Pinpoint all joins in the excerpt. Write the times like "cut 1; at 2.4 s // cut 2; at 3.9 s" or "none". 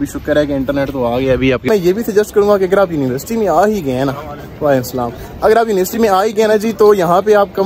cut 1; at 1.7 s

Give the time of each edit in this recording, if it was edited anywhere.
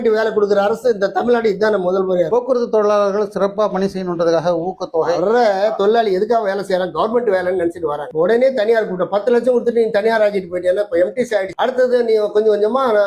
none

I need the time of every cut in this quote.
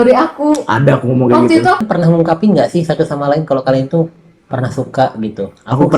cut 1; at 1.8 s

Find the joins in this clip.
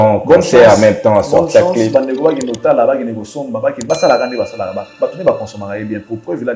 none

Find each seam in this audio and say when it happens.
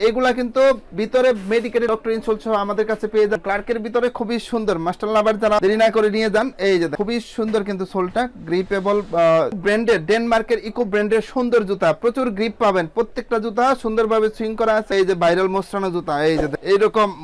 cut 1; at 3.4 s // cut 2; at 9.5 s // cut 3; at 14.9 s

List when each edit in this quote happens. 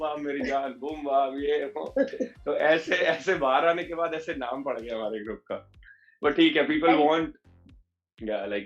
none

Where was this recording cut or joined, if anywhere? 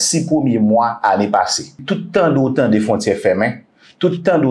cut 1; at 1.8 s

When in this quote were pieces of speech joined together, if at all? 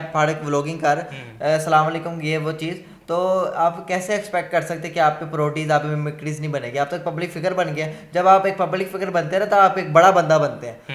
none

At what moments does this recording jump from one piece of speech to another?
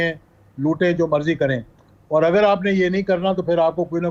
none

